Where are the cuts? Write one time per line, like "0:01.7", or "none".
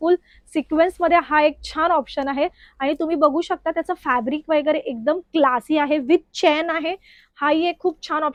none